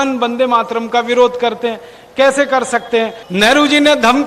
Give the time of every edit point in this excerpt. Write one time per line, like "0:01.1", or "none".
0:03.2